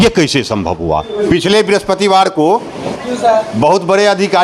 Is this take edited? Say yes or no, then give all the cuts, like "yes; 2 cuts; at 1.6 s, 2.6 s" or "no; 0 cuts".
yes; 1 cut; at 1.1 s